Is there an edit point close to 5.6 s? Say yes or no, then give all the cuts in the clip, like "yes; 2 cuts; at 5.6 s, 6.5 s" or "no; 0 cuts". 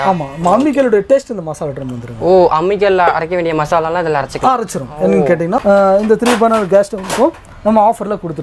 yes; 1 cut; at 5.6 s